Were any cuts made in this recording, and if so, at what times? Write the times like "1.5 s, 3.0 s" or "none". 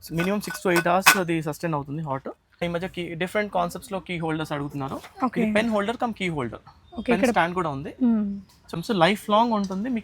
2.6 s, 8.7 s